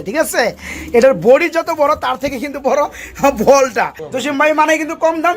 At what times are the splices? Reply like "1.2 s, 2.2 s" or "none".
4.0 s

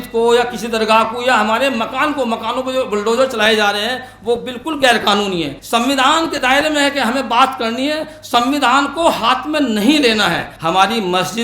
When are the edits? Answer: 5.6 s, 10.5 s

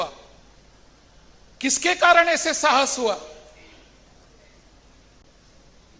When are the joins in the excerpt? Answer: none

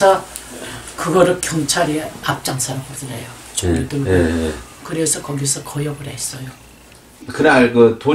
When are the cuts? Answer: 7.2 s

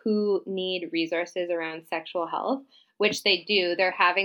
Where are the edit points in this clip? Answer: none

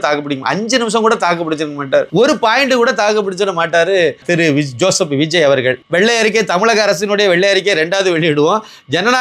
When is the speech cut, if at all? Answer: 2.1 s, 4.2 s, 5.8 s

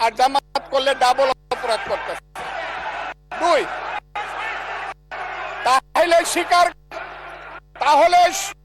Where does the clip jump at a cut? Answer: none

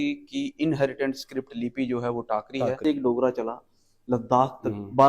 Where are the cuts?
2.8 s

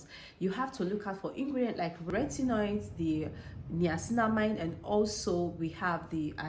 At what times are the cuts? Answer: 2.1 s

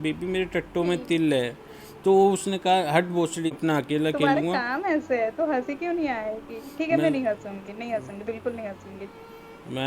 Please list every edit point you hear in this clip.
3.5 s

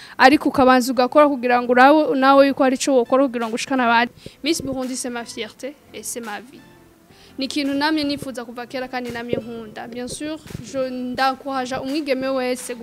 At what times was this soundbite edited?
4.1 s

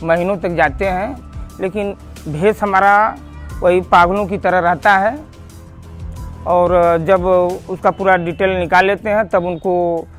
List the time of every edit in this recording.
none

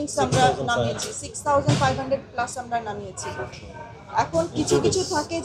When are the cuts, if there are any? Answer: none

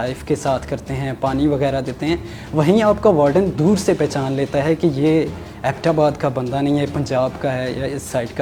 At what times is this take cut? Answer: none

